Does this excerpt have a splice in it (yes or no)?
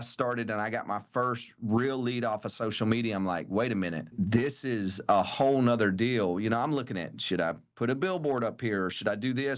yes